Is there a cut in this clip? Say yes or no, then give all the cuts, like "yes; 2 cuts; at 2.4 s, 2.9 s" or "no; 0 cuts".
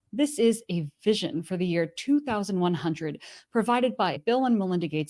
yes; 1 cut; at 4.2 s